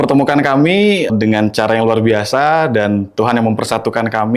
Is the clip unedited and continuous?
no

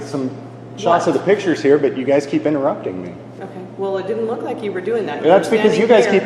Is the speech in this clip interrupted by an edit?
no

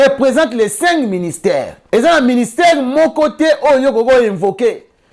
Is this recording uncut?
no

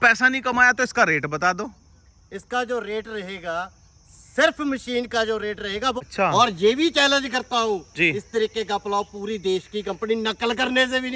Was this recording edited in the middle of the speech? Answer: yes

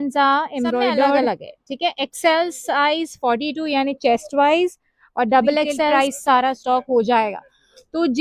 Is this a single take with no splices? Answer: no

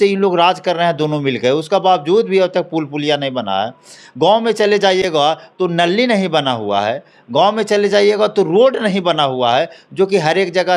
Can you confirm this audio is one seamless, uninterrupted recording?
yes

